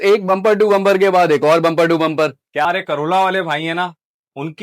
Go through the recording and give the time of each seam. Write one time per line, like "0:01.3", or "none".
0:02.6